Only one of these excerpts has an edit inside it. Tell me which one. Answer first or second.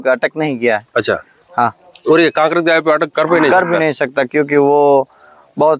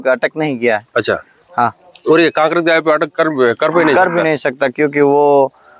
first